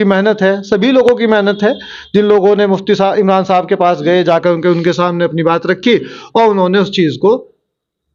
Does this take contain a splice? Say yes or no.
no